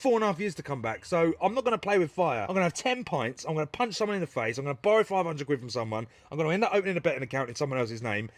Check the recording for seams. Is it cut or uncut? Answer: cut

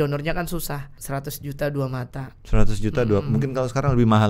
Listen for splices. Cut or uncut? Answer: cut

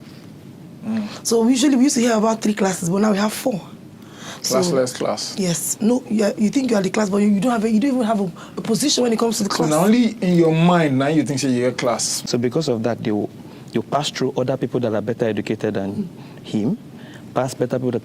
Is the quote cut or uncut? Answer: cut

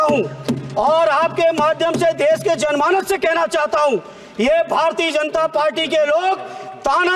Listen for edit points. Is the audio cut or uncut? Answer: uncut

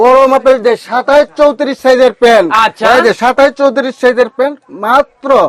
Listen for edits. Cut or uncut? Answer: uncut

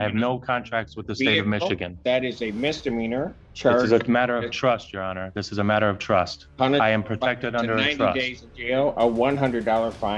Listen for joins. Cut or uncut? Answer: uncut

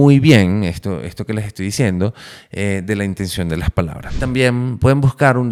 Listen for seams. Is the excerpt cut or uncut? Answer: uncut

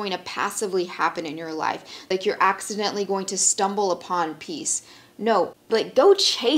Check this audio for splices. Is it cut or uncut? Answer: cut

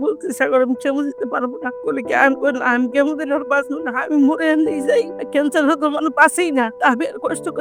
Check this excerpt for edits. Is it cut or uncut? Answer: uncut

